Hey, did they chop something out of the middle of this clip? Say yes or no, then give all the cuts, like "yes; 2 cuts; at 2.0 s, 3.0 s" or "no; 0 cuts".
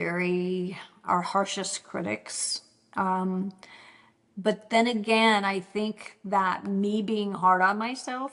no; 0 cuts